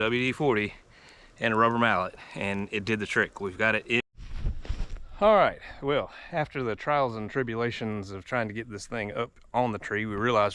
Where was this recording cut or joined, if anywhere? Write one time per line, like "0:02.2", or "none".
0:04.0